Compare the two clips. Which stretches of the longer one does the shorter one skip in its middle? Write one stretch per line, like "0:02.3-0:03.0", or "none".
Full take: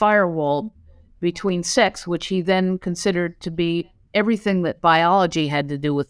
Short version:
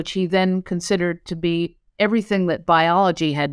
none